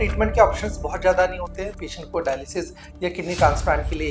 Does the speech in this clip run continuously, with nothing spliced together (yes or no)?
yes